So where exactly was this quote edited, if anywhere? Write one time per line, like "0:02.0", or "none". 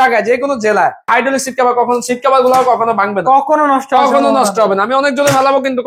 0:01.1

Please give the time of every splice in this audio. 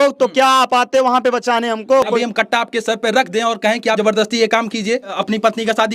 0:02.1
0:04.0
0:05.1

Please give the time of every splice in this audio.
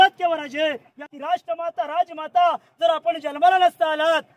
0:01.1

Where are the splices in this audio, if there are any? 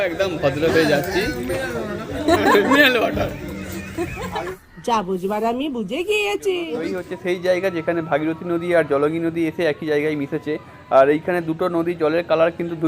0:07.0

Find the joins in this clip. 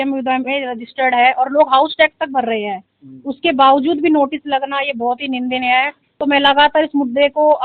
0:06.0

